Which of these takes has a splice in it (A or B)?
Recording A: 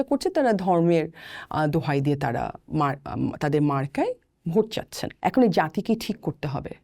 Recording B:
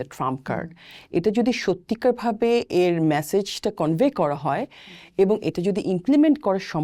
A